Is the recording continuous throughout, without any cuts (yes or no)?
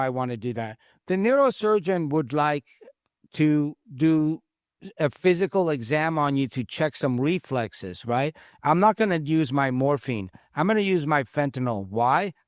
yes